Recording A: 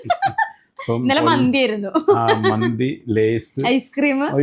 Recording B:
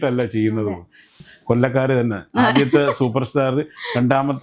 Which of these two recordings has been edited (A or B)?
B